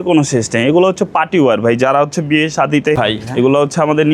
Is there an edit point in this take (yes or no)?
yes